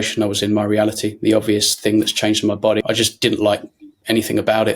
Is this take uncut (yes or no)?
no